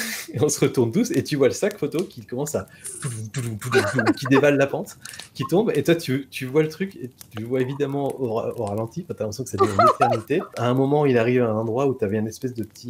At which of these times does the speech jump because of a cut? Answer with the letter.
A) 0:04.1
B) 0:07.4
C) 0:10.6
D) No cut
C